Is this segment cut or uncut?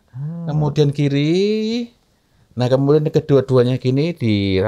uncut